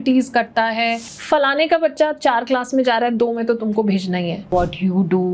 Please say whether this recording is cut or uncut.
cut